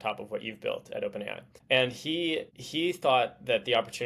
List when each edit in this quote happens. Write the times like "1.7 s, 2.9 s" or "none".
1.5 s, 2.6 s

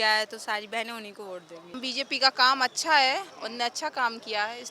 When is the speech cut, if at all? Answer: 1.8 s, 3.4 s

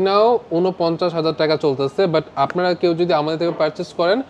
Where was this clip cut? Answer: none

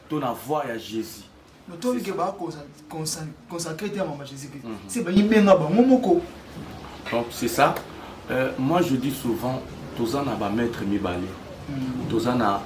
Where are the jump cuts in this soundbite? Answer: none

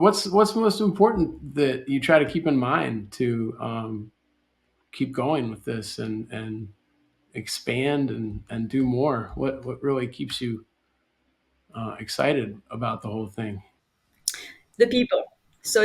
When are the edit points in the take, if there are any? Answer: none

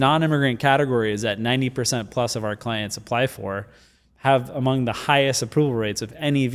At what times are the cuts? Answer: none

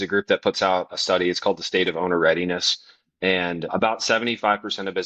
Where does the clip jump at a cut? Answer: 0.9 s, 3.7 s

